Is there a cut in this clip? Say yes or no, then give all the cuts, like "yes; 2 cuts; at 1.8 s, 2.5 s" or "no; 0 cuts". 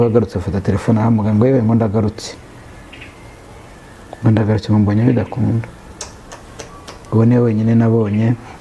no; 0 cuts